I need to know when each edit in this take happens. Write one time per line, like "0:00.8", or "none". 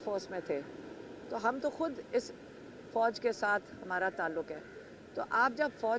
none

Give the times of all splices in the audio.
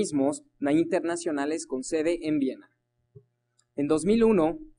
0:03.6

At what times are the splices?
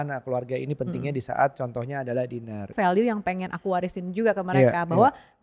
0:02.7

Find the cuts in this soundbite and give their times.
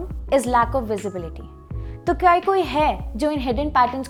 none

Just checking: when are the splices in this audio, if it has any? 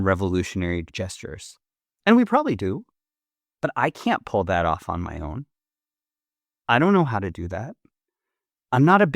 0:01.0

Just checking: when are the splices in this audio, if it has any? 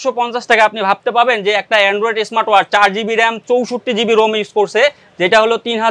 none

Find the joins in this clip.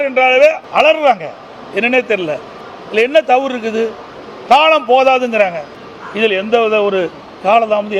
none

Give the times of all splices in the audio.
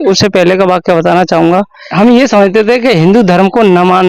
0:01.8

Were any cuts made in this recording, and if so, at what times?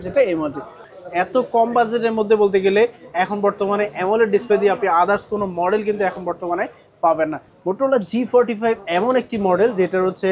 0:00.8
0:07.5

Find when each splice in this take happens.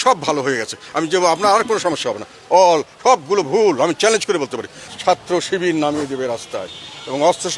0:04.8

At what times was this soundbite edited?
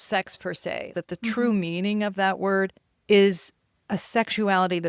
0:00.9
0:02.9

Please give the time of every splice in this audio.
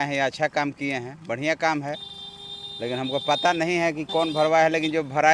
none

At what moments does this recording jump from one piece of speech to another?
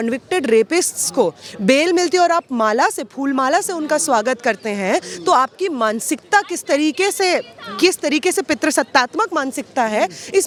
none

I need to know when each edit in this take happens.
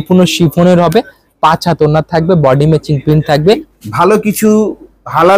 0:03.8

